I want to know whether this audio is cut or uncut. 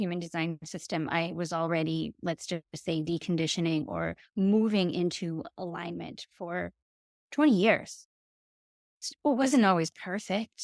uncut